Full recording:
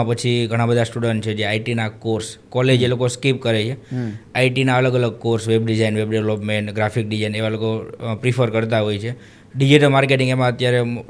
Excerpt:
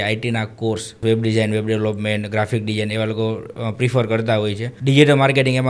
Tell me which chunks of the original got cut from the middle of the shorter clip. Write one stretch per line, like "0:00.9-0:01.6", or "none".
0:02.4-0:05.4
0:09.1-0:09.4